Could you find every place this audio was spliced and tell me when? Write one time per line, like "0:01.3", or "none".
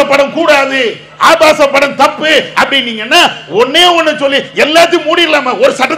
none